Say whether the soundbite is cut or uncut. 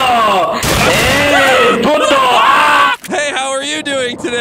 cut